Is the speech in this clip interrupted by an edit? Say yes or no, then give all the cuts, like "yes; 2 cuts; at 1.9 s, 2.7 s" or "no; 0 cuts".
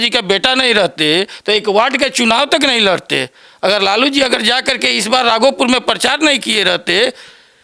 no; 0 cuts